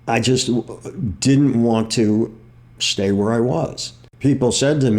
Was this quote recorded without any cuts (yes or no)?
no